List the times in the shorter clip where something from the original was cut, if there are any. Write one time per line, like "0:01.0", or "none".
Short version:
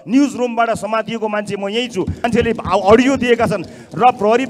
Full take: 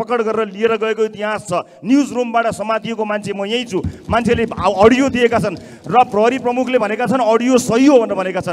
0:02.2